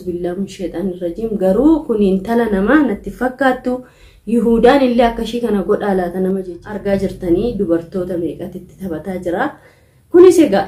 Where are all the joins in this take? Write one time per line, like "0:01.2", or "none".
0:06.5